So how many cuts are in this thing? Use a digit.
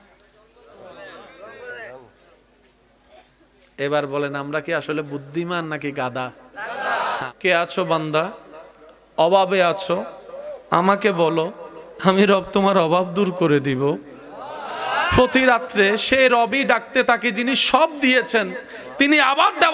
1